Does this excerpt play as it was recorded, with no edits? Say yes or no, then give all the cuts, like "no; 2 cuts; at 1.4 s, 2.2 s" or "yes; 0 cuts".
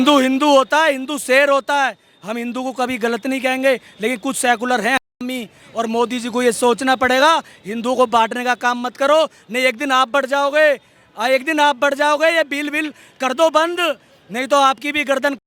yes; 0 cuts